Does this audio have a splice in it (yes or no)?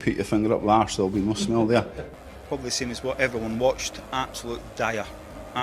yes